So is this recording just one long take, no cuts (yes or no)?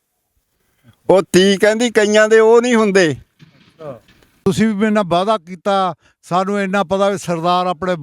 no